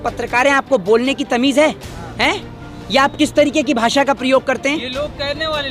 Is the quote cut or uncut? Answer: uncut